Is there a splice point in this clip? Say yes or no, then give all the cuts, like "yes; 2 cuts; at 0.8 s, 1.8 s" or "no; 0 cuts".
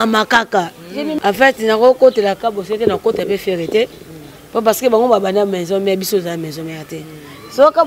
yes; 1 cut; at 1.1 s